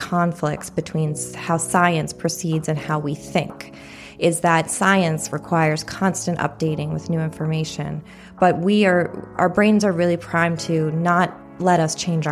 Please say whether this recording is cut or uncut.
uncut